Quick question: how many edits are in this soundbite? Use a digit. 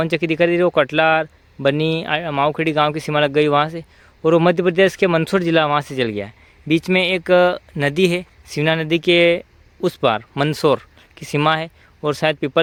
0